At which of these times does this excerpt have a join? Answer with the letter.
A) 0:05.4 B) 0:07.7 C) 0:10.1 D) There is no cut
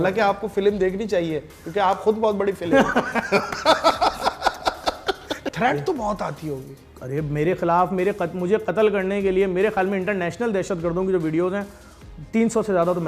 A